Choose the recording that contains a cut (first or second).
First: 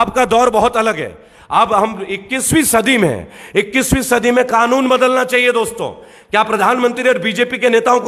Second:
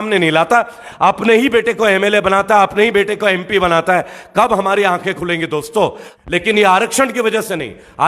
second